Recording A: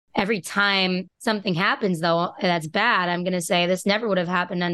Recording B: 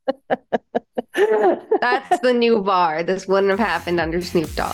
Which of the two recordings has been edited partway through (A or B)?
A